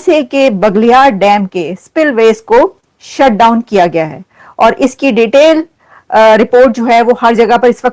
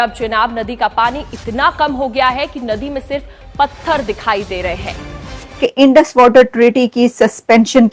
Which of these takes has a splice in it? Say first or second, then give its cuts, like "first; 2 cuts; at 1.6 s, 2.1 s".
second; 1 cut; at 5.6 s